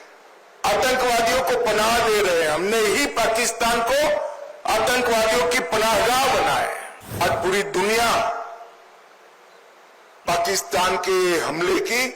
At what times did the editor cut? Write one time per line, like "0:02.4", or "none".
0:07.2